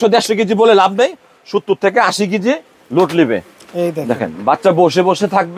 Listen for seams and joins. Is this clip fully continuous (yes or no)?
yes